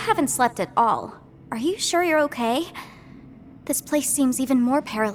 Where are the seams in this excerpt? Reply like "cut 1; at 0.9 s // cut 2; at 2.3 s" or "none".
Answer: none